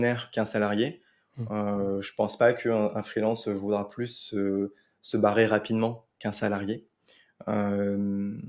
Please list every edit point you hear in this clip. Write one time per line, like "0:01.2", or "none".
none